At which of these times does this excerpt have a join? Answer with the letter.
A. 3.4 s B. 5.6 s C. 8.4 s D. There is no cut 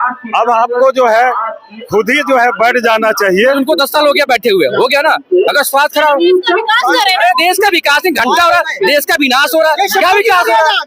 A